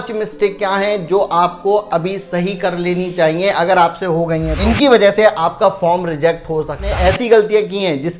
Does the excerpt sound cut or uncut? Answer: cut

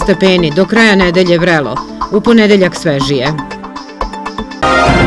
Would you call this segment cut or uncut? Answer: cut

